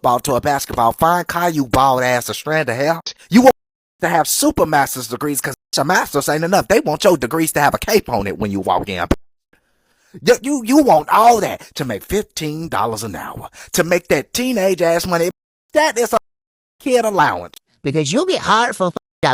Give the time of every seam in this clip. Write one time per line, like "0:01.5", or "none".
none